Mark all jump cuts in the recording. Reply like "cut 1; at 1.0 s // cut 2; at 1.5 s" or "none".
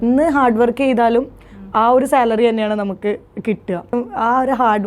cut 1; at 4.0 s